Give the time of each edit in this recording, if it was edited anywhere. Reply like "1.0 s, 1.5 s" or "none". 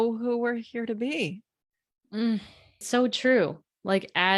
2.8 s